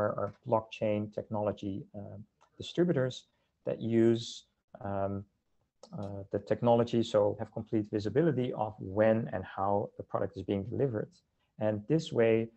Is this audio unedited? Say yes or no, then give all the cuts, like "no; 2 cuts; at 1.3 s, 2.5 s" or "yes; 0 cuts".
no; 1 cut; at 7.5 s